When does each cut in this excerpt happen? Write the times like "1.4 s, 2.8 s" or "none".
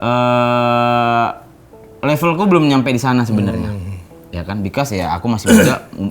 none